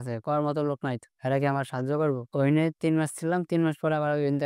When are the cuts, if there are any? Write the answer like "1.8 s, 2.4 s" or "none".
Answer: 2.2 s